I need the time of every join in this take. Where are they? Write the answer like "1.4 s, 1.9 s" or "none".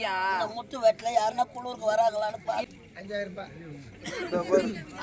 2.7 s